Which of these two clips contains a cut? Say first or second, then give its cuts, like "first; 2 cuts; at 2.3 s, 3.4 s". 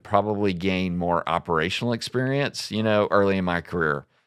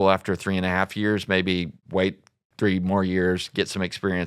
second; 1 cut; at 1.8 s